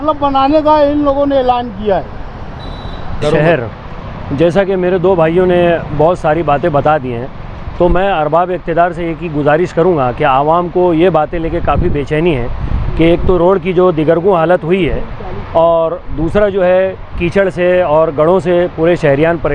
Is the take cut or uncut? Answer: uncut